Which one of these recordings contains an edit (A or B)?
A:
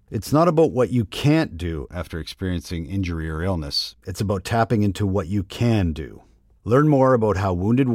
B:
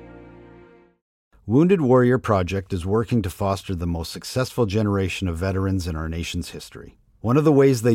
B